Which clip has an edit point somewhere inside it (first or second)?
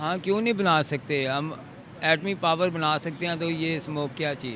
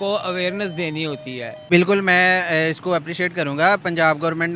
second